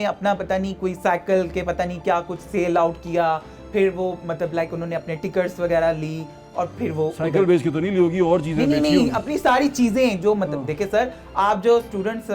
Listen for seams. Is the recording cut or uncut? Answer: uncut